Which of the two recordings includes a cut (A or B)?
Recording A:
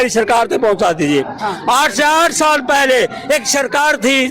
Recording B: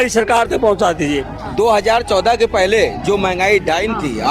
B